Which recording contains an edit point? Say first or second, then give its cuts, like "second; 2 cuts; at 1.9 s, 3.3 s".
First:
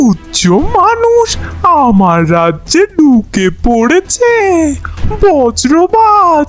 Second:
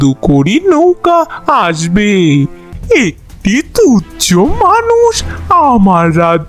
second; 1 cut; at 2.7 s